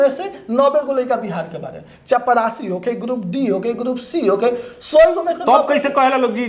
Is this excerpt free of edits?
no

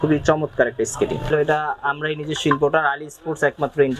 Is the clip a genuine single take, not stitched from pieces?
no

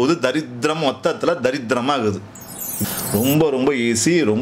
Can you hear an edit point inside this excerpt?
yes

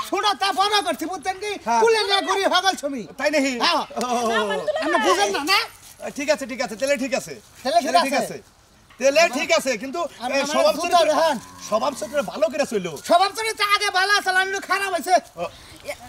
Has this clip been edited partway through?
no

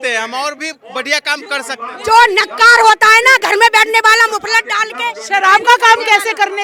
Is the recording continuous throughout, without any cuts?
yes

